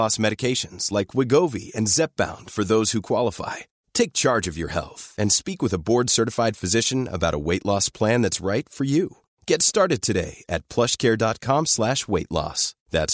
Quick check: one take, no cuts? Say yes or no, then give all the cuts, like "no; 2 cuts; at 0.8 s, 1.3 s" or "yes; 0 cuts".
yes; 0 cuts